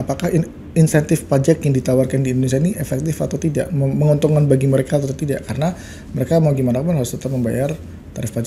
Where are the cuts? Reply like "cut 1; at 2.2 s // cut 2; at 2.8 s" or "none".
none